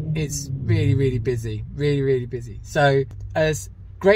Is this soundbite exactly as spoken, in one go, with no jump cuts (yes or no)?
yes